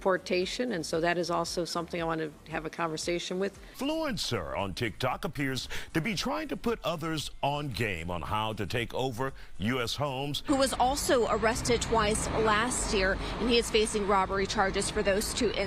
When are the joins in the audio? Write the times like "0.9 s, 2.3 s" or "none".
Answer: 3.6 s, 10.4 s